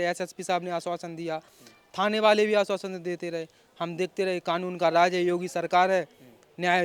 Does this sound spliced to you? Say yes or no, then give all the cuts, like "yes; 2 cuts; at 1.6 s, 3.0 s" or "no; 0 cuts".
no; 0 cuts